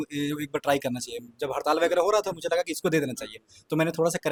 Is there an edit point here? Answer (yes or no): no